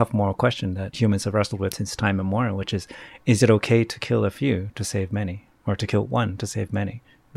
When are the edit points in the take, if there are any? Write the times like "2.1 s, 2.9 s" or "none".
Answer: 0.9 s, 1.8 s